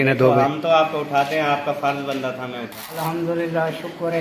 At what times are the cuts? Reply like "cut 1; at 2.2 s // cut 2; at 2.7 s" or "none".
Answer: cut 1; at 3.0 s